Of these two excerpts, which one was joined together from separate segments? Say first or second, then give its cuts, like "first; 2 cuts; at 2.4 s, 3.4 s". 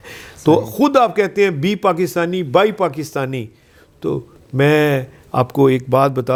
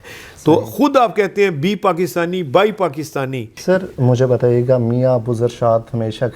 second; 1 cut; at 3.5 s